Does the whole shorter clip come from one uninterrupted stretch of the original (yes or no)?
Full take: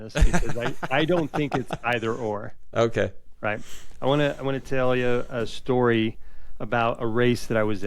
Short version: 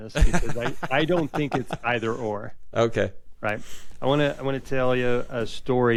yes